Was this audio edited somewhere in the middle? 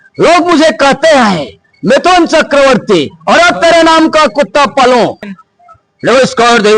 yes; 1 cut; at 5.3 s

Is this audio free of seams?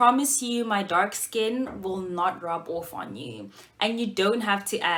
yes; 0 cuts

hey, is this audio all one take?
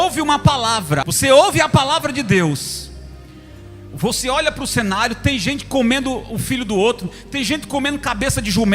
no; 1 cut; at 1.0 s

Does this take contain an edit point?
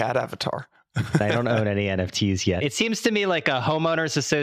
yes; 1 cut; at 2.6 s

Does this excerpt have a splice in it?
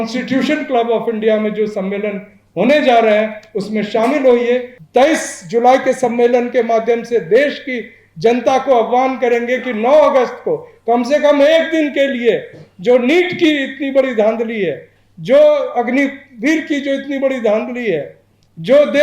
yes; 1 cut; at 4.7 s

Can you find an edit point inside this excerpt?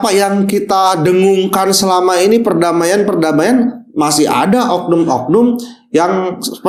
no; 0 cuts

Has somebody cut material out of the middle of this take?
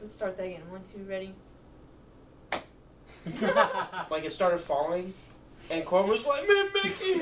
yes; 1 cut; at 4.1 s

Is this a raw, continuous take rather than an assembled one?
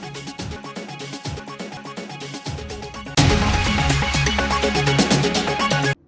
yes; 0 cuts

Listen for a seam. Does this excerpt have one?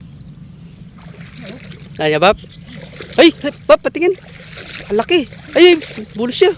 no; 0 cuts

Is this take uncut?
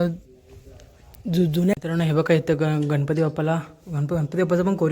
no; 1 cut; at 1.4 s

